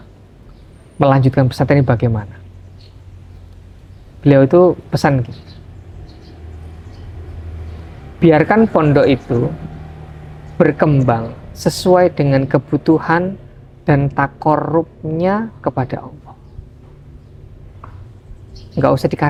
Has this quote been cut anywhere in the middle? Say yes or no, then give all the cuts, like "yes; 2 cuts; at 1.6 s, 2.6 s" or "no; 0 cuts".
no; 0 cuts